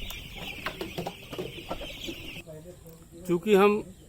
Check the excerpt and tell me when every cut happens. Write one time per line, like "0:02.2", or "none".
0:02.3